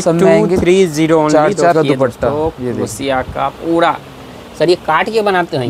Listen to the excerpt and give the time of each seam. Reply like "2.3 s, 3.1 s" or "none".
1.7 s

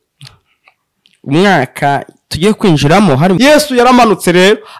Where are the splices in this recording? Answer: 3.4 s

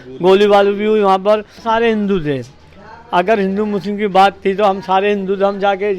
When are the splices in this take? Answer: 1.5 s

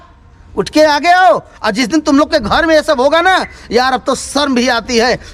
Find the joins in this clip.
none

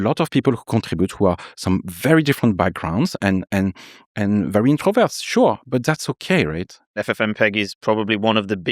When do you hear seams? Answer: 7.0 s

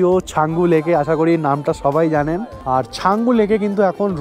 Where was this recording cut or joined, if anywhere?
2.6 s

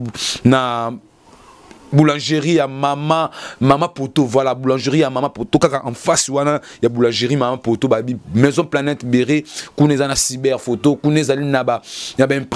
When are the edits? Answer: none

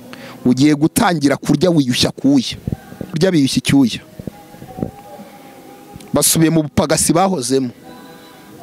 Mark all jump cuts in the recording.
3.2 s

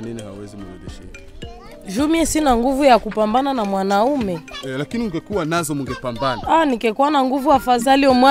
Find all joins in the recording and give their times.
none

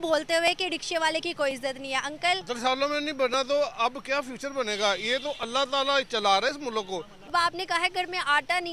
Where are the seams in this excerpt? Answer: 2.4 s, 7.3 s

